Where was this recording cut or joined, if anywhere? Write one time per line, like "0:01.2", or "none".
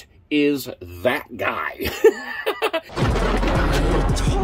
0:02.9